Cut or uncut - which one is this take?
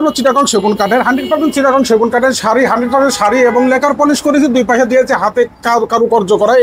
uncut